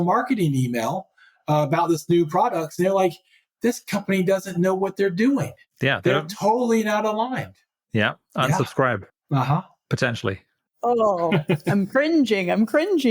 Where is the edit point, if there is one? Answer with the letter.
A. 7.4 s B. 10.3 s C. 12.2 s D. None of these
B